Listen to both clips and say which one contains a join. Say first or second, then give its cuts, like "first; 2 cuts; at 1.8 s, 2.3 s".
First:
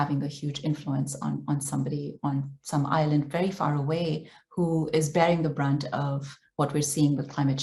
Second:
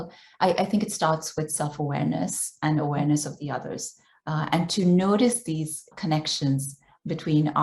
second; 1 cut; at 5.9 s